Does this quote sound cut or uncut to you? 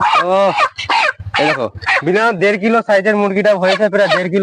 uncut